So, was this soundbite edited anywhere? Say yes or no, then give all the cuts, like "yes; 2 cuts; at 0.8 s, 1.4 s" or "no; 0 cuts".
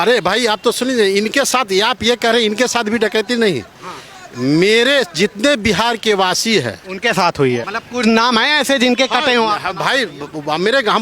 yes; 1 cut; at 7.7 s